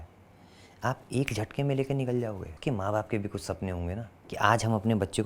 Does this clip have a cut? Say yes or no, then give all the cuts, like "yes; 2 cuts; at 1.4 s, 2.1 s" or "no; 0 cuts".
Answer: yes; 2 cuts; at 2.5 s, 4.2 s